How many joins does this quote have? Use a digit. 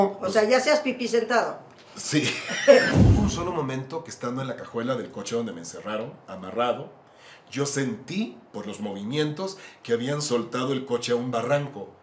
1